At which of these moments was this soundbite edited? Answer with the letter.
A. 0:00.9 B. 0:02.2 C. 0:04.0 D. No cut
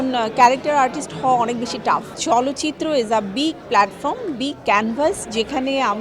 B